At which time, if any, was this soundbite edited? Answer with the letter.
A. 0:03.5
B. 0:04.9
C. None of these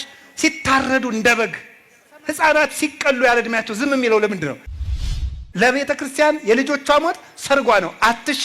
B